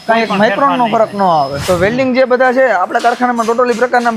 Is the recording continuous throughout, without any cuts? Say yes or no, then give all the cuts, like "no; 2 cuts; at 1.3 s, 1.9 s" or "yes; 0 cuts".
no; 1 cut; at 1.6 s